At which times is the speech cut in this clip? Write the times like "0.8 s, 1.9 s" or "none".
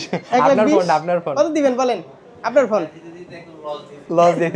none